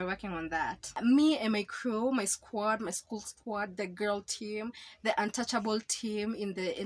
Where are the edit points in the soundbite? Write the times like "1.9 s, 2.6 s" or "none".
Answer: 1.0 s